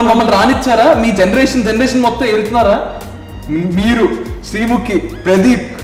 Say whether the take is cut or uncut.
uncut